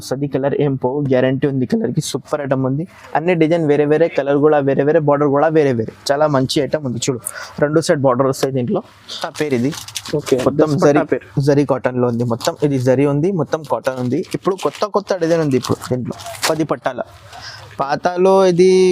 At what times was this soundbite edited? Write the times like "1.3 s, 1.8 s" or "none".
9.2 s